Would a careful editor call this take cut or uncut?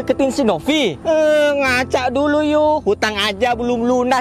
cut